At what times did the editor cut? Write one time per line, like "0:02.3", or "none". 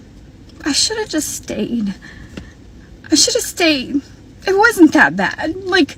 none